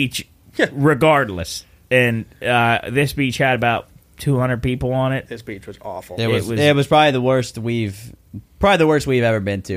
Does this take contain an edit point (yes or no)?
yes